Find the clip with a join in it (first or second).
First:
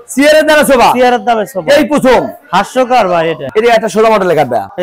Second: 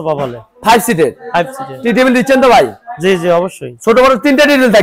first